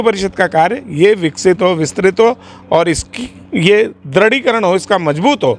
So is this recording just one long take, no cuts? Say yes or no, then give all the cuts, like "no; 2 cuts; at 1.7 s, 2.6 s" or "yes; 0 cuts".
yes; 0 cuts